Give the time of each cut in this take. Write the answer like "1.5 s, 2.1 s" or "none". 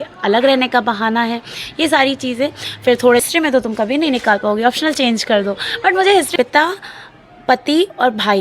3.2 s, 6.3 s